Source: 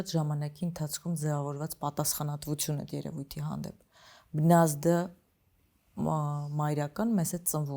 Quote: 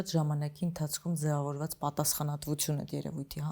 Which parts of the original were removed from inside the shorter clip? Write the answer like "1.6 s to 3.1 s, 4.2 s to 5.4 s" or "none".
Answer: none